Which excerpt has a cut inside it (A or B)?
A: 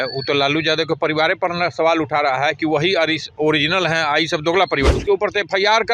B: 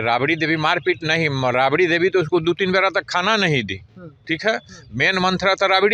A